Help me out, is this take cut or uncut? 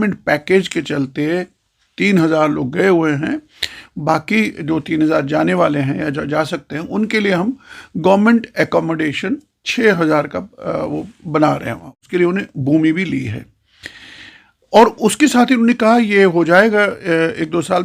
uncut